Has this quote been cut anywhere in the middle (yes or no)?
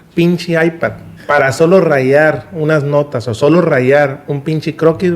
yes